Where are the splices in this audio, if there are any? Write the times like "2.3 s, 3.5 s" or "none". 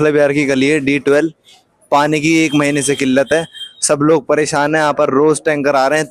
none